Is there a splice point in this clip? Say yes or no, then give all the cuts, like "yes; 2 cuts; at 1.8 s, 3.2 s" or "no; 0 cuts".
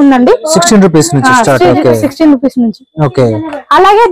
no; 0 cuts